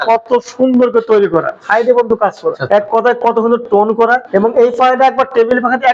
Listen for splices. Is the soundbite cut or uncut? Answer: cut